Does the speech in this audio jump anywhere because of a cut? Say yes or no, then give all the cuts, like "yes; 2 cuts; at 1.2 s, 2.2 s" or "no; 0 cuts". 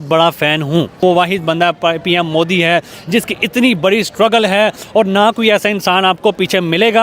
yes; 1 cut; at 1.0 s